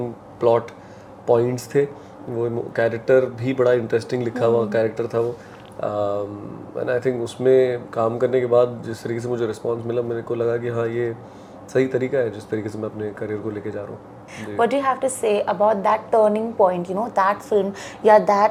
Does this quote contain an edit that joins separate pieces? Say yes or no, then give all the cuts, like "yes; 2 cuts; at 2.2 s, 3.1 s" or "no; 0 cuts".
no; 0 cuts